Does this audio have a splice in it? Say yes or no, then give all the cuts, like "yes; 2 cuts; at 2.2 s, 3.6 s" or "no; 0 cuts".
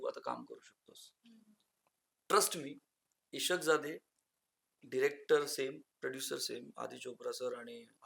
no; 0 cuts